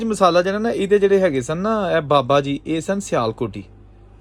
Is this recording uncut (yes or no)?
yes